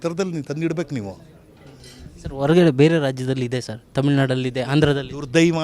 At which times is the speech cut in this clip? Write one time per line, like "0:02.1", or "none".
none